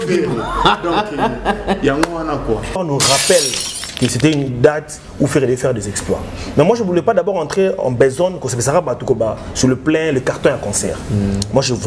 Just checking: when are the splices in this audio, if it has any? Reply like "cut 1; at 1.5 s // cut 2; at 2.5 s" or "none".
cut 1; at 2.8 s